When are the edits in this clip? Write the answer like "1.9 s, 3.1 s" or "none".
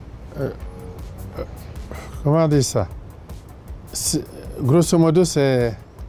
none